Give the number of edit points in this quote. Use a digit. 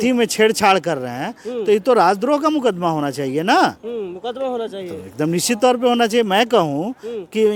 0